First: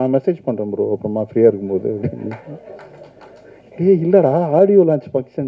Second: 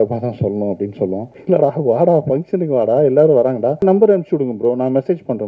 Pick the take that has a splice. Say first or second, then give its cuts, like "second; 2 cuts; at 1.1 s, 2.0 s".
second; 2 cuts; at 1.3 s, 3.8 s